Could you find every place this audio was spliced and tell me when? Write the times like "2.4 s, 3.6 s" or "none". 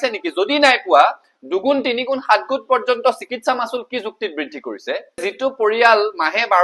5.3 s